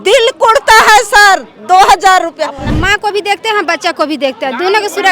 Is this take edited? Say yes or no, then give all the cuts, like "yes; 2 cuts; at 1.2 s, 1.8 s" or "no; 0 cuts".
yes; 1 cut; at 2.6 s